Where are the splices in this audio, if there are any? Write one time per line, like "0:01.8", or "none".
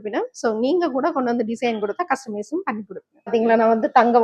0:03.3